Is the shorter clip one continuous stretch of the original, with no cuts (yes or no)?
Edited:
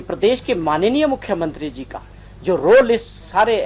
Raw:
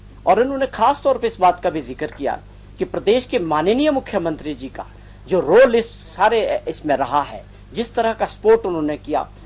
yes